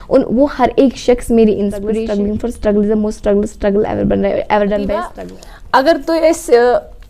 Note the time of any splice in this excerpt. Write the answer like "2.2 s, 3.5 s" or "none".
1.9 s, 5.1 s

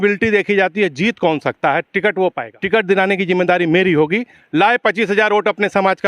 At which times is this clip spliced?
2.5 s

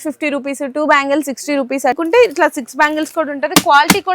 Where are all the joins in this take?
2.0 s

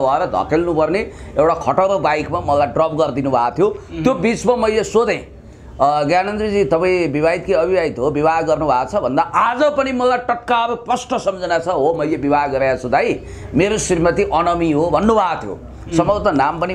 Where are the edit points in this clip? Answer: none

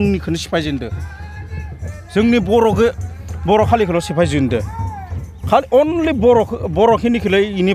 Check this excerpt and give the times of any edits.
none

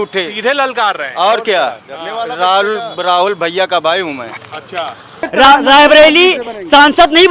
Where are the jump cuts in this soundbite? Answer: 5.2 s

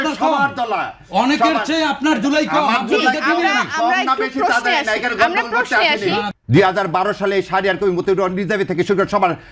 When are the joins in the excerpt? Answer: 6.3 s

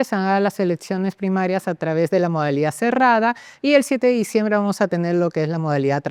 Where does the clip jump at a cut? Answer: none

